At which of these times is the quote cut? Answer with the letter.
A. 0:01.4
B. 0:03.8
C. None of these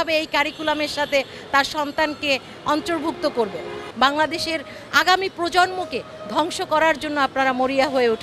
B